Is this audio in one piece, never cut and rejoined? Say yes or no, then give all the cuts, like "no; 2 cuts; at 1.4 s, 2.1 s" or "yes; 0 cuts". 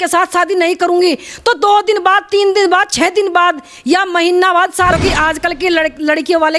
no; 1 cut; at 5.0 s